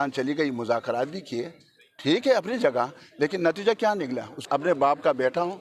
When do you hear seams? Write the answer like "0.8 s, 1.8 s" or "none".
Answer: 4.5 s